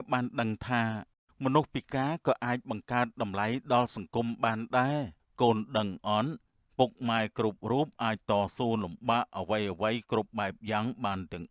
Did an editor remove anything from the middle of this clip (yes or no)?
yes